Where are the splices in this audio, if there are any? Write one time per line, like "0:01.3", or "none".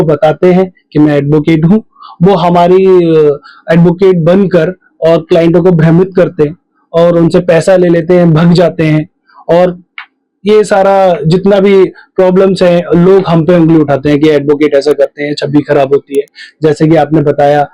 none